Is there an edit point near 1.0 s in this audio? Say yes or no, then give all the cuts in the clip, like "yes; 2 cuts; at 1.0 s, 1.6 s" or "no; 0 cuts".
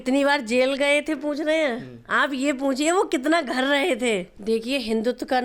no; 1 cut; at 4.3 s